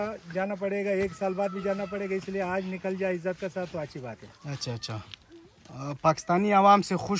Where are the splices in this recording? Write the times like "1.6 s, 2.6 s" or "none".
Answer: none